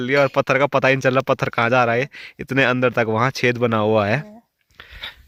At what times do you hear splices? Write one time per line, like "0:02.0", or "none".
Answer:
none